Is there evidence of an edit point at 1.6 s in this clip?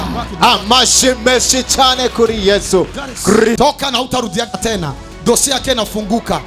no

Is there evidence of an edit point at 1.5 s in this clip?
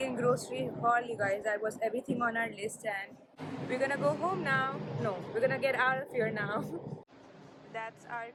no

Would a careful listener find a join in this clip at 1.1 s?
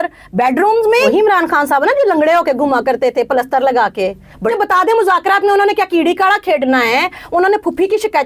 yes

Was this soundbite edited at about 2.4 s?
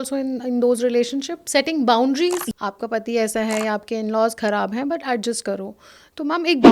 yes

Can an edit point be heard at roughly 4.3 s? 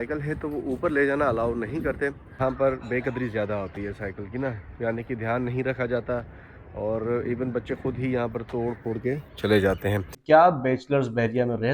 no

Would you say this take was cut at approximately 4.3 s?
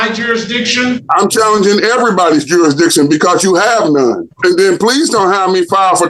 yes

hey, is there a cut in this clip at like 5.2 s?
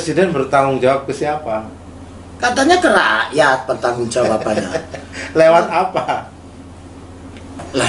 no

